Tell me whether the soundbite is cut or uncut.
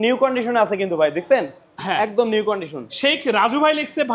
uncut